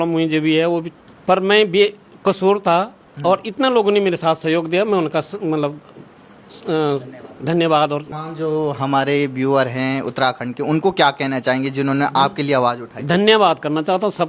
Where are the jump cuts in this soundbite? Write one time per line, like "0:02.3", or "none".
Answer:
0:01.1
0:08.1